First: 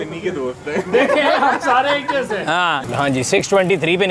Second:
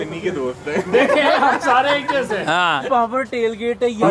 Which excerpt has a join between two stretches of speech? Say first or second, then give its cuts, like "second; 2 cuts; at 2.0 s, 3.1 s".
second; 1 cut; at 2.8 s